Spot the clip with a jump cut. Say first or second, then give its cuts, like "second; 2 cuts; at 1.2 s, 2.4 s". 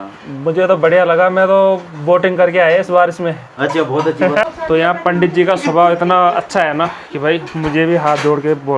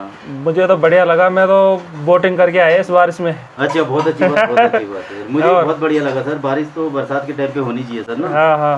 first; 1 cut; at 4.4 s